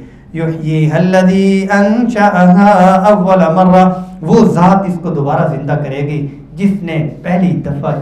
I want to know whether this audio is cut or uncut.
uncut